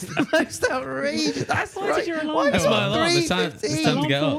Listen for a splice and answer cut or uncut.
uncut